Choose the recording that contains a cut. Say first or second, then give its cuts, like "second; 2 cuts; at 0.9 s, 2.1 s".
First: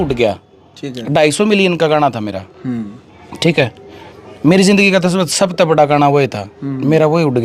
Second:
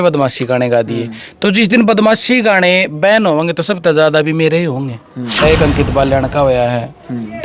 second; 1 cut; at 5.4 s